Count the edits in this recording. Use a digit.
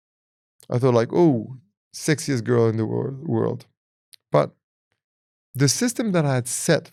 0